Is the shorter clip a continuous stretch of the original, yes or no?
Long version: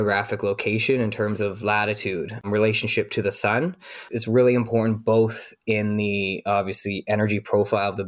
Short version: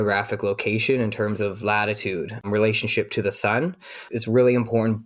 yes